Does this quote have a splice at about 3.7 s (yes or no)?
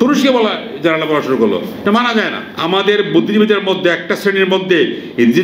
no